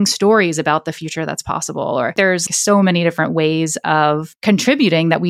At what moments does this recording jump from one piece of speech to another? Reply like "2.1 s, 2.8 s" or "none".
2.4 s, 4.3 s

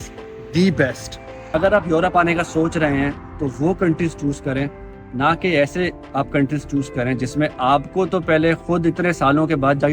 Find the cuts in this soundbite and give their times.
1.5 s

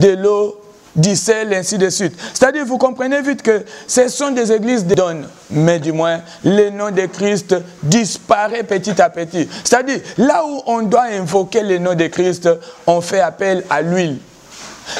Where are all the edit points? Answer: 4.9 s

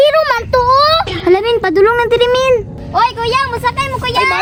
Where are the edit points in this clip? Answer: none

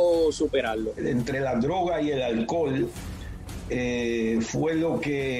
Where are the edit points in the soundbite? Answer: 1.0 s

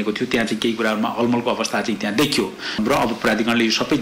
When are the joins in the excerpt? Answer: none

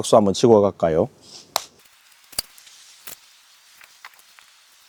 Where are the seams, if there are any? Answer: none

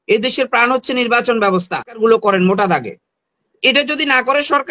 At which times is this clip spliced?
2.0 s

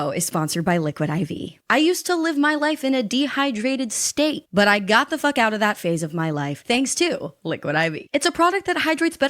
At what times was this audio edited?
1.5 s

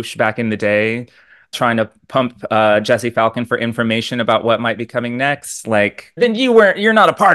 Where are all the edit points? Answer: 1.5 s, 6.2 s

